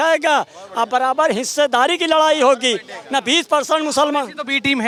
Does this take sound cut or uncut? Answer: uncut